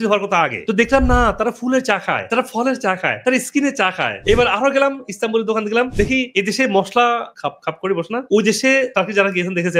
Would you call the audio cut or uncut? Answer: uncut